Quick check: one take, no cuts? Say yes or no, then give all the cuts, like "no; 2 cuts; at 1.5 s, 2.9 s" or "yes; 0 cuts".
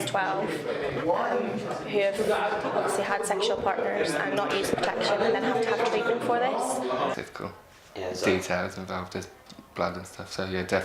no; 1 cut; at 7.1 s